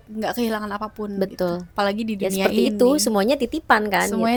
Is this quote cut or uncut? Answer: uncut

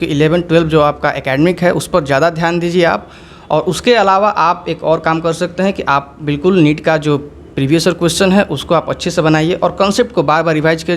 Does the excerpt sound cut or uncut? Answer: uncut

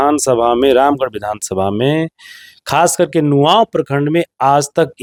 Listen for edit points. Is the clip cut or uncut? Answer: uncut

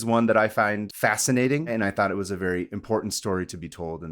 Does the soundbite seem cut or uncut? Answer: cut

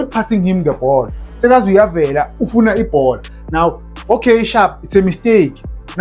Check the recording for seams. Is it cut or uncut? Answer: uncut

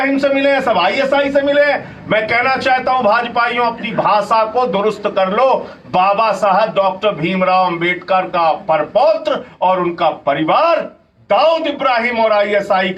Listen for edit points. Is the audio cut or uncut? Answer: uncut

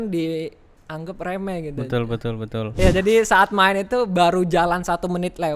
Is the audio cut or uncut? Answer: cut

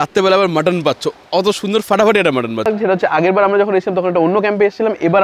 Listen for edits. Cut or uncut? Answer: cut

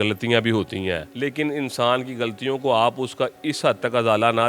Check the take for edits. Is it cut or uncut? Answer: cut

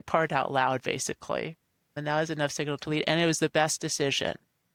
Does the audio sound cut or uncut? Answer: uncut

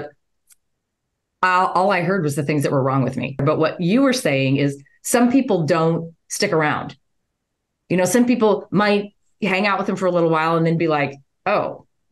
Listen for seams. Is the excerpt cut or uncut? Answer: cut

